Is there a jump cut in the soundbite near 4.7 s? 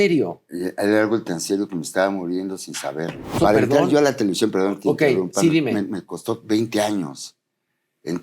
no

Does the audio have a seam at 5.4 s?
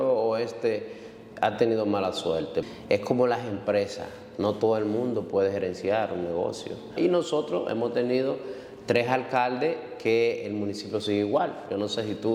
no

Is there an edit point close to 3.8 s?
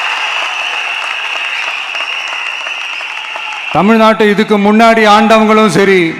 yes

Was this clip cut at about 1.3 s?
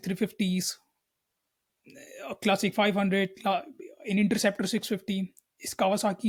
no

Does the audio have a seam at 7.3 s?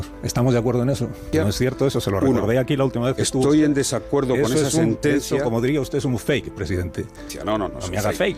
yes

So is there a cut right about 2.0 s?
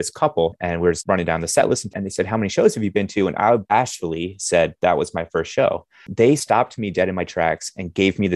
yes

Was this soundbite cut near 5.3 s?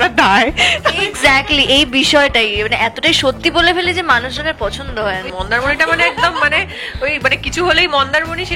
yes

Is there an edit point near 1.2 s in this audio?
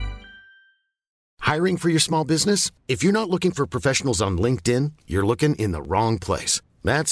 yes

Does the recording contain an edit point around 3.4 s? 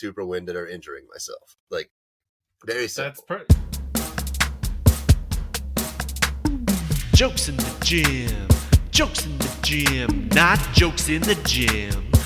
yes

